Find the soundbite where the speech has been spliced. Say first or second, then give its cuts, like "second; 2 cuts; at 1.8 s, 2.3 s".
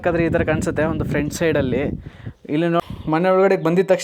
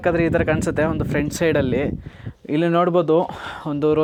first; 1 cut; at 2.8 s